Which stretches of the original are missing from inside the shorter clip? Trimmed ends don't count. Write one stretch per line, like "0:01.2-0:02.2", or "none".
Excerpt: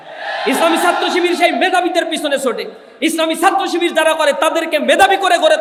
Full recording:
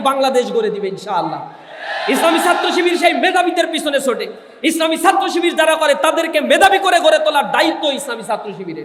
none